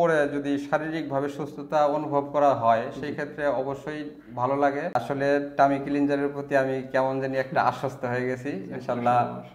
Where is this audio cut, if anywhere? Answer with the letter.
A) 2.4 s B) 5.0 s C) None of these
B